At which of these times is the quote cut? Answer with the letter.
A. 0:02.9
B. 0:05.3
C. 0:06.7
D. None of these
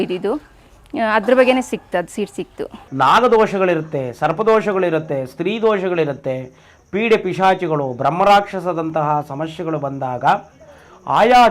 A